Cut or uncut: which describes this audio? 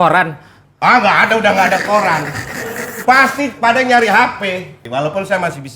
cut